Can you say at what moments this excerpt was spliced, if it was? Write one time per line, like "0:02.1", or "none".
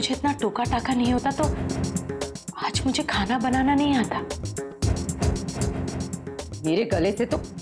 0:06.1